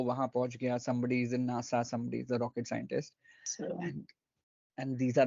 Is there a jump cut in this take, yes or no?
yes